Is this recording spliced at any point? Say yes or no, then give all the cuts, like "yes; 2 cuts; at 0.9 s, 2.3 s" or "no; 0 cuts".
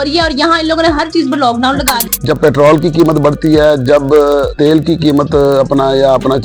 yes; 2 cuts; at 2.0 s, 4.5 s